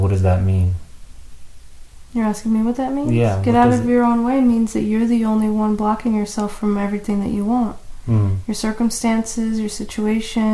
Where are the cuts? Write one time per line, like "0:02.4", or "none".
none

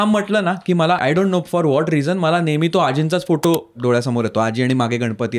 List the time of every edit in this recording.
0:01.0

